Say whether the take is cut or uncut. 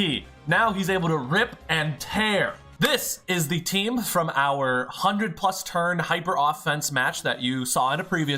cut